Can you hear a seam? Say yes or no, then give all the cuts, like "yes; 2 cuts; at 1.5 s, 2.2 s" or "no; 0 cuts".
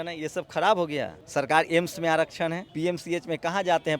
yes; 2 cuts; at 1.2 s, 2.7 s